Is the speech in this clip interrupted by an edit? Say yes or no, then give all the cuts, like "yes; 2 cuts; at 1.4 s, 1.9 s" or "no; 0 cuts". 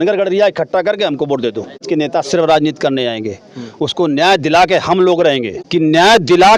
yes; 2 cuts; at 1.8 s, 5.5 s